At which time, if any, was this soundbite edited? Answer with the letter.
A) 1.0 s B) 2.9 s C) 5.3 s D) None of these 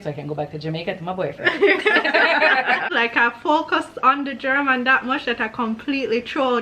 B